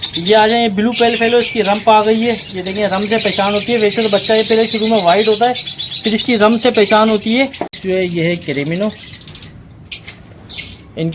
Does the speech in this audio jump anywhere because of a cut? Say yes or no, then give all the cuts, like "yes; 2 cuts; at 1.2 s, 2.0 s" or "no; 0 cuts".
yes; 1 cut; at 7.7 s